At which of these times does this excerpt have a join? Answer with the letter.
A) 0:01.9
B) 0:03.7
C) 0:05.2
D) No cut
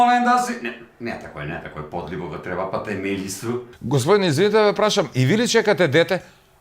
B